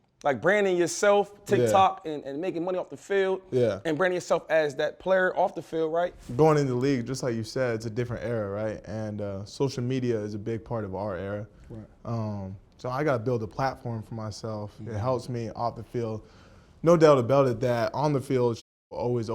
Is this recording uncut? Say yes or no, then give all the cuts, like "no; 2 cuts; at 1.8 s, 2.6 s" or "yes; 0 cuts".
no; 1 cut; at 6.2 s